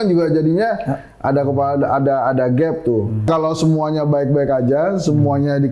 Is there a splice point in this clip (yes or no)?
yes